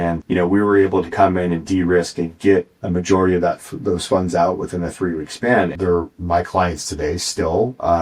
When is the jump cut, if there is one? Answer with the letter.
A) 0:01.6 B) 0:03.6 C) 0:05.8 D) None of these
C